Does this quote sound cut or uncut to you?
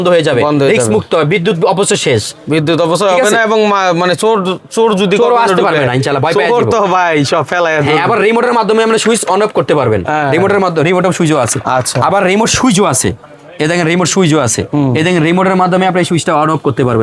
uncut